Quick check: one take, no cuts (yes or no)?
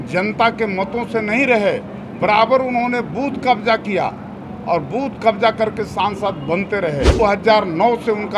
no